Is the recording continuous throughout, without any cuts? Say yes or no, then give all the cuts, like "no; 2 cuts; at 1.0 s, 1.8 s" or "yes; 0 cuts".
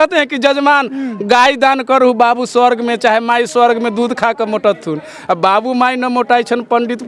yes; 0 cuts